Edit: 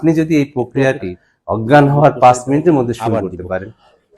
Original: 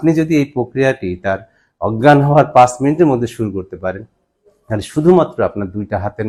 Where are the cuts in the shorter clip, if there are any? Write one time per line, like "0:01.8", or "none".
0:01.1

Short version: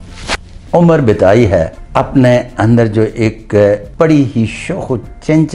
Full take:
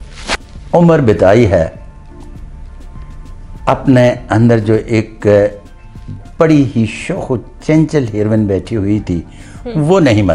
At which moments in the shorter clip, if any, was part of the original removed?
0:01.8
0:03.9

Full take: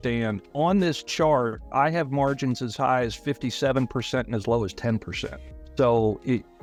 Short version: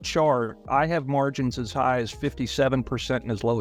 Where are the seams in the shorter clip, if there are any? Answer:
none

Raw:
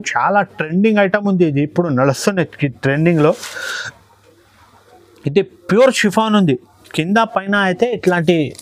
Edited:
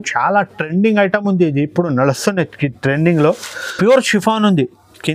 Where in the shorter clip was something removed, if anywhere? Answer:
0:03.7

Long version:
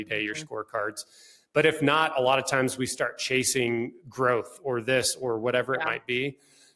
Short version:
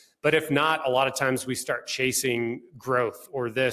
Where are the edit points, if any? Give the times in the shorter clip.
none

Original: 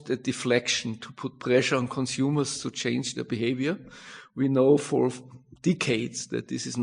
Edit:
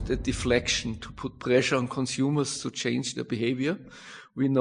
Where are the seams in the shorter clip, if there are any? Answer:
none

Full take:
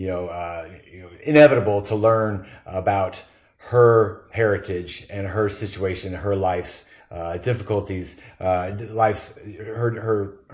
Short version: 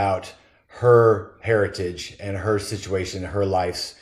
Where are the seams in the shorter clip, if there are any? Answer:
none

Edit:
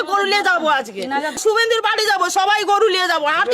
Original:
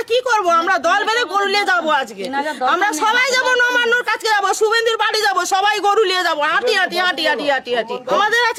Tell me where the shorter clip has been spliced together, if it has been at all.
0:01.4

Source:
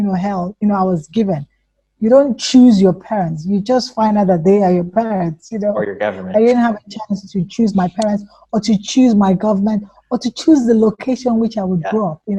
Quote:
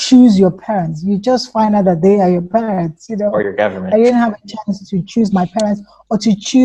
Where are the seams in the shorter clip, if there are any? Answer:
none

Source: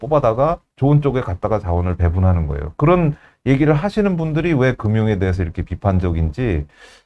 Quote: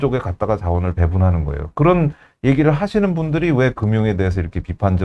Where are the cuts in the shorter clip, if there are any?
none

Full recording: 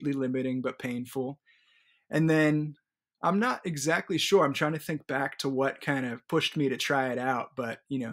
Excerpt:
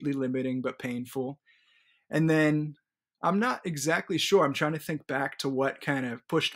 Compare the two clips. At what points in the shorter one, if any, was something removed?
none

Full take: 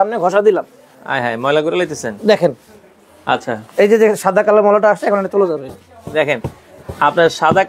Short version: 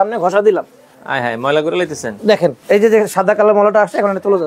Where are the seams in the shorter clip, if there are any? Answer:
0:02.6

